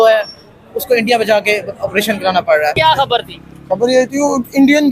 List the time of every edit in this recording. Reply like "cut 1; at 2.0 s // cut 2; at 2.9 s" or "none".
cut 1; at 2.7 s